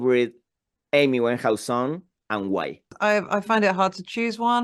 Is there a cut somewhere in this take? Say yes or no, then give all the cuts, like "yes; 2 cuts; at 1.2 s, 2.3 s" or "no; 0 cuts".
yes; 1 cut; at 2.9 s